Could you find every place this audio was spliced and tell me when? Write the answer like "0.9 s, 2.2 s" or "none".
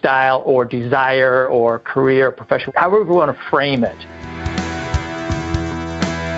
2.7 s, 4.2 s